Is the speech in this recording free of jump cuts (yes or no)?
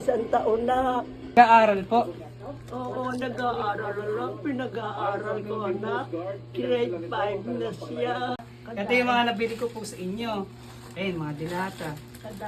no